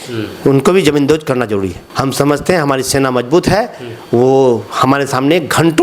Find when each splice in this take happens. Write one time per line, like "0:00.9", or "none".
0:01.8

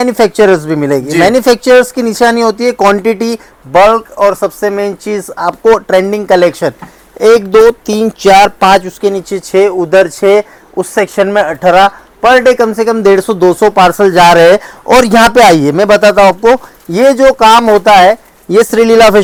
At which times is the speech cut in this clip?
none

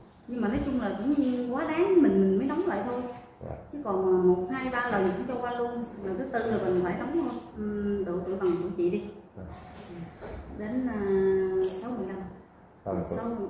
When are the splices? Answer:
0:07.5

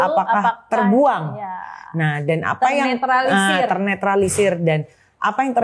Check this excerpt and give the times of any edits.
none

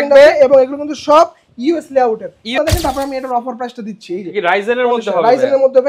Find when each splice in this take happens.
0:02.5

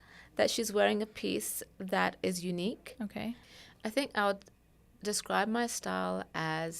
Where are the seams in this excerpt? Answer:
0:03.5

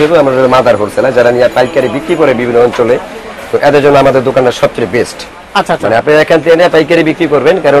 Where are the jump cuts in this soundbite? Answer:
none

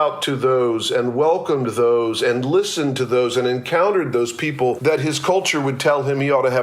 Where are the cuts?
0:04.8

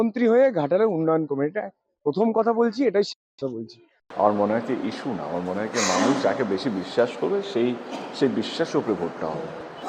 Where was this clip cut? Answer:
0:04.1

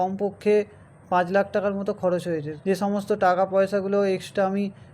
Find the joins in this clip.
0:02.5

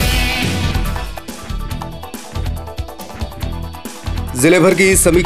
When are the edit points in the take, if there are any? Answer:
0:04.3

